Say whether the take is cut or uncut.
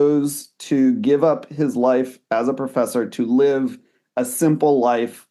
uncut